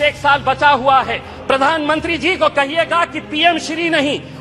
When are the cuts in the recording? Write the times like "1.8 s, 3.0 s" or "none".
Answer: 1.3 s